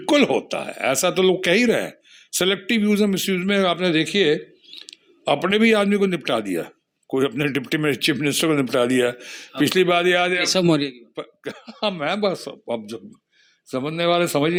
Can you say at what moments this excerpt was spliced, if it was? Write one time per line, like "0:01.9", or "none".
none